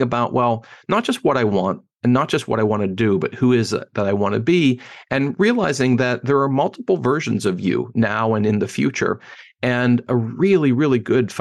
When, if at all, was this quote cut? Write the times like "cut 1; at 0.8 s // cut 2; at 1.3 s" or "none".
none